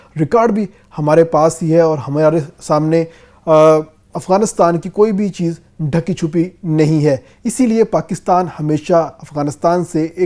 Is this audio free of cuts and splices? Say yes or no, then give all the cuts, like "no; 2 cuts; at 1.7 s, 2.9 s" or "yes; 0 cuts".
yes; 0 cuts